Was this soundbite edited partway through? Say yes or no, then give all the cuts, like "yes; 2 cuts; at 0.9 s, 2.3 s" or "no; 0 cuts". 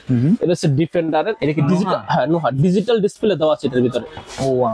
no; 0 cuts